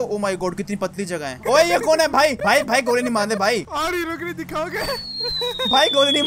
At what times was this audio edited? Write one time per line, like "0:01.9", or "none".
0:01.4
0:03.6